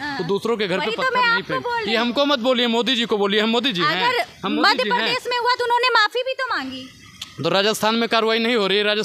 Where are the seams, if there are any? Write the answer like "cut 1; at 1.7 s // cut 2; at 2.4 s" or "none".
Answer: none